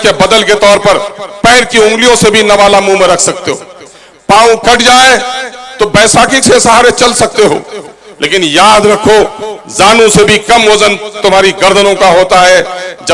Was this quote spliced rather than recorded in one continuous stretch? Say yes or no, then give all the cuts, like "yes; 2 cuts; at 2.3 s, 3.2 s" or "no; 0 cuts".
no; 0 cuts